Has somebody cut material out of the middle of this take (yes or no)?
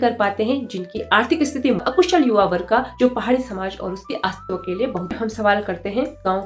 yes